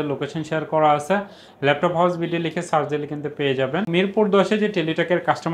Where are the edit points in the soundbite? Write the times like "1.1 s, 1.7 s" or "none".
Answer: 3.9 s